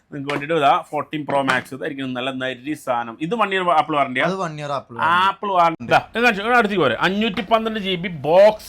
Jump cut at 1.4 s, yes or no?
no